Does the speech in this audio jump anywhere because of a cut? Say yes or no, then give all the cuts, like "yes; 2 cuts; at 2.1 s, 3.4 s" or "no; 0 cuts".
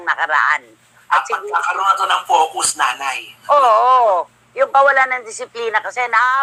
no; 0 cuts